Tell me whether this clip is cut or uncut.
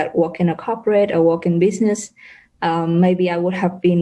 uncut